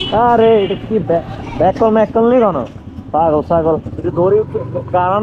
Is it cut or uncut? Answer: uncut